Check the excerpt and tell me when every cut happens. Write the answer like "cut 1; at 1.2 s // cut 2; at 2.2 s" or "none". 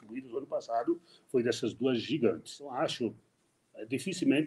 cut 1; at 2.7 s